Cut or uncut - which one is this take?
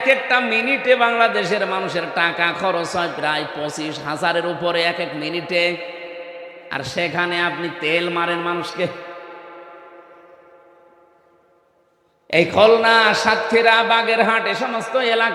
uncut